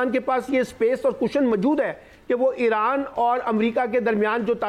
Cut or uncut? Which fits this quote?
uncut